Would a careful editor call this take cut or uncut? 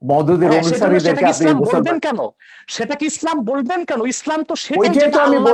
uncut